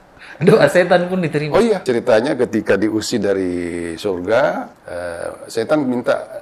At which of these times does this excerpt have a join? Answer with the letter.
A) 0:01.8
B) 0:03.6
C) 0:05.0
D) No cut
D